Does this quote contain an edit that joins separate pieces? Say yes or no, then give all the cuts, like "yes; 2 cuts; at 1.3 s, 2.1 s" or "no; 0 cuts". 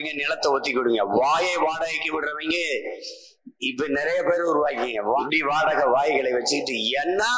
yes; 1 cut; at 5.2 s